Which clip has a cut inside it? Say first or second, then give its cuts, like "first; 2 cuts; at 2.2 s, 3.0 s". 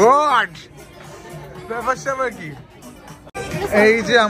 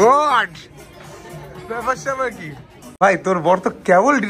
second; 1 cut; at 3.0 s